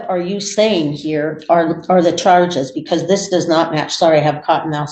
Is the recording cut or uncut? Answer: uncut